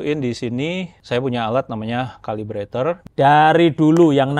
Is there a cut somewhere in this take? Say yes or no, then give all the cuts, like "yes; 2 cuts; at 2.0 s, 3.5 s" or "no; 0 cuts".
yes; 2 cuts; at 0.9 s, 3.0 s